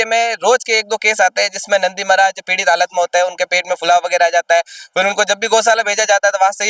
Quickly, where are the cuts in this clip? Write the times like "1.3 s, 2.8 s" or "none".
none